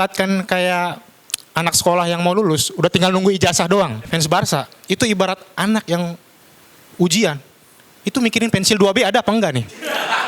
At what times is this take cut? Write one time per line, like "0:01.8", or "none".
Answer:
0:04.0